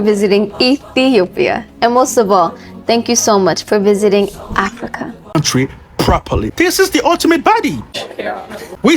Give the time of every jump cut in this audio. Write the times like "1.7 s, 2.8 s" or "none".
5.3 s